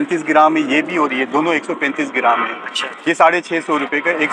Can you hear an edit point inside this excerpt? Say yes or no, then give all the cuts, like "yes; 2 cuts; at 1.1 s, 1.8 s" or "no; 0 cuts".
no; 0 cuts